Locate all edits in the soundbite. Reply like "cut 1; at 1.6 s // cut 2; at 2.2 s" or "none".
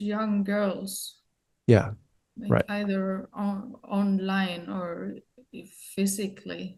none